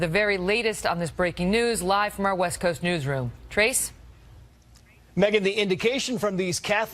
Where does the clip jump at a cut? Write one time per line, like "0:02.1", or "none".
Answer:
0:04.6